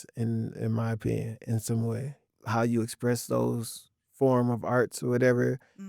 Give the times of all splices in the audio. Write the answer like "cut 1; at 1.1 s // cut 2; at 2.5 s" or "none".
cut 1; at 2.2 s